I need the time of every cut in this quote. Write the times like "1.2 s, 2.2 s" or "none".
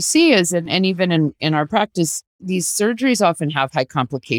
2.4 s